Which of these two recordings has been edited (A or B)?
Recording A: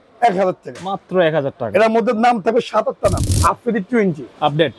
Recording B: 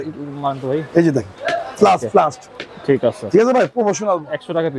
A